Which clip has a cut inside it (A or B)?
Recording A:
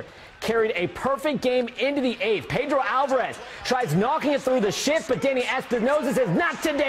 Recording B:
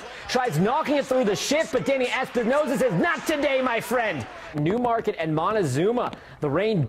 B